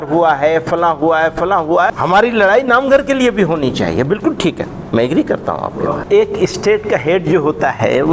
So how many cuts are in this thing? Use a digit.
2